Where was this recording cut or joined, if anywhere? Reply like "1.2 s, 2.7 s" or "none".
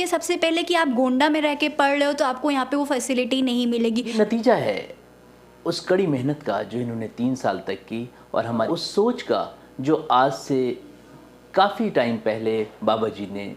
4.1 s, 8.7 s